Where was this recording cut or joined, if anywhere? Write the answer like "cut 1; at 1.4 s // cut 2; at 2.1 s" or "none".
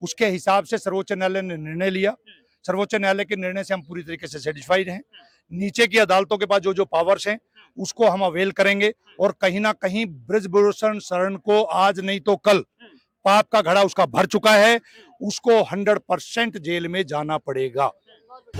none